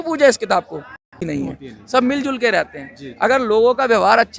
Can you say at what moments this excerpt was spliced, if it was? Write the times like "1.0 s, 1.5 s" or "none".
1.2 s